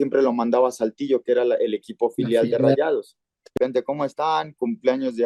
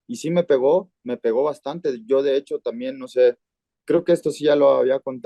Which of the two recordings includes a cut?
first; 1 cut; at 3.5 s

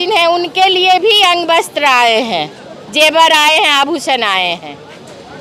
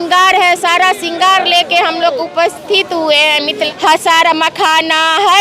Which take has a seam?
second; 1 cut; at 3.7 s

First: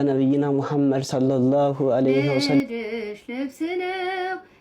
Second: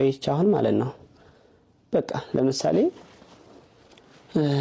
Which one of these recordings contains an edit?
first; 1 cut; at 2.6 s

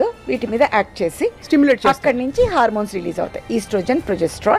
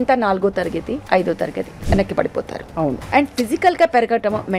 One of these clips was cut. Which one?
second; 3 cuts; at 1.0 s, 1.7 s, 3.0 s

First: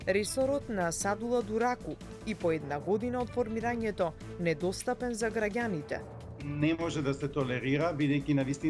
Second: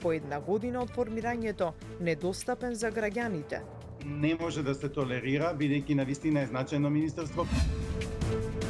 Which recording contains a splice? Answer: second; 1 cut; at 7.8 s

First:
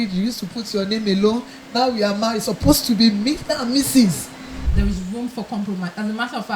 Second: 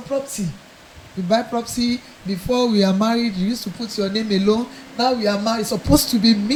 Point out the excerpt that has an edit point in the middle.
first; 1 cut; at 4.6 s

